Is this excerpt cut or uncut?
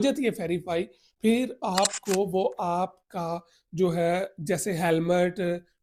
uncut